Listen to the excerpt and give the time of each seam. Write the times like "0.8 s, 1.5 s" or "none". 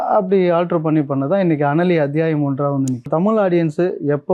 3.1 s